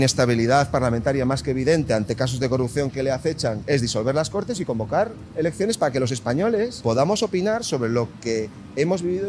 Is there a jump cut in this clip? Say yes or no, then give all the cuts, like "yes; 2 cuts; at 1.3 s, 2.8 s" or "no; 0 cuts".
yes; 2 cuts; at 3.6 s, 6.8 s